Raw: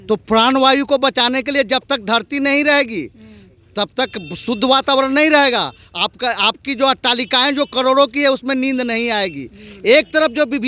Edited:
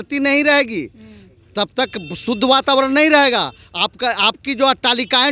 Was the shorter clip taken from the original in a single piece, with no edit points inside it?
yes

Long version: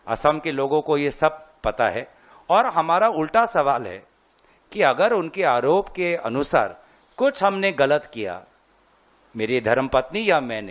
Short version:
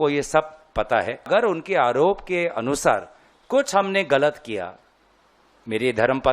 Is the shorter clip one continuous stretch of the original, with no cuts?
no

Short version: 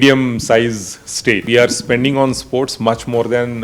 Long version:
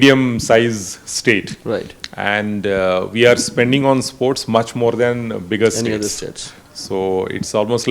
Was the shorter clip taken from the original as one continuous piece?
no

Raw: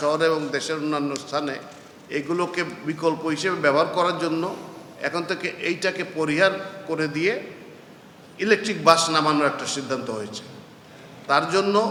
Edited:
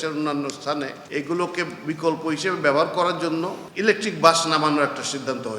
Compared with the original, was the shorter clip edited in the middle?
yes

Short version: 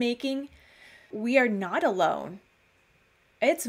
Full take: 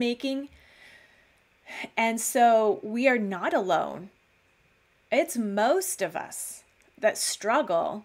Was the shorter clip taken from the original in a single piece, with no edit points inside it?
no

